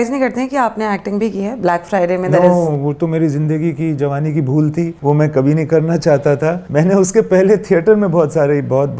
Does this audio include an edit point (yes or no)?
yes